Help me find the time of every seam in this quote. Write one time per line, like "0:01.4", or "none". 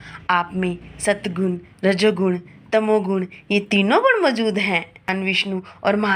0:05.1